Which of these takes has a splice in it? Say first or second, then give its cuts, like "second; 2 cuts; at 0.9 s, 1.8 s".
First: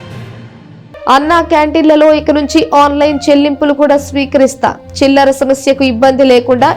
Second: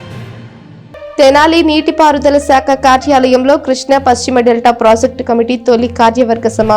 first; 1 cut; at 1.1 s